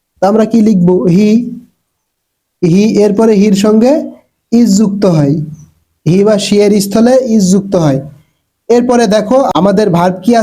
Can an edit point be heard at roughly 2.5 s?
no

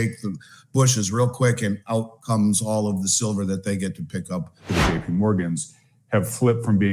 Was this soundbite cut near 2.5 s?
no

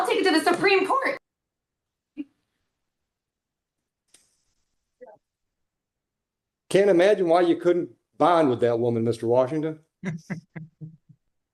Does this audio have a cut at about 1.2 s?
no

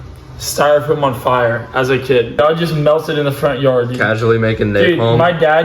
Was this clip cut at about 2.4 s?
yes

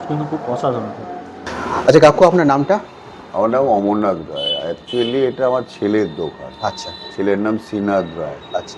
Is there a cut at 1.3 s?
no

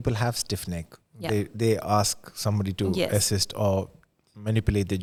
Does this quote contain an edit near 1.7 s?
no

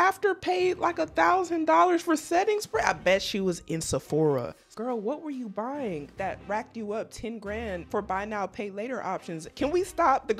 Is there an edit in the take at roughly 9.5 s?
yes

